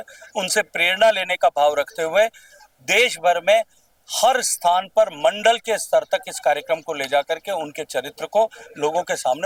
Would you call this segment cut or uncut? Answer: uncut